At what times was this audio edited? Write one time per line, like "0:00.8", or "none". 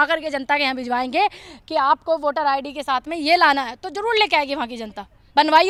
none